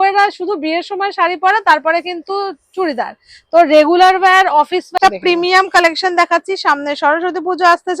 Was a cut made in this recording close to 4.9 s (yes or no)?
yes